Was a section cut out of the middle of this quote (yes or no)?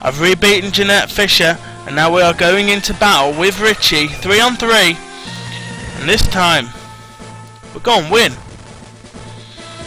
yes